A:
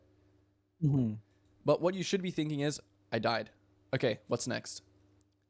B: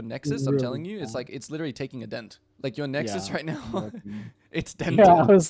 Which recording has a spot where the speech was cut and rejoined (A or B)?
B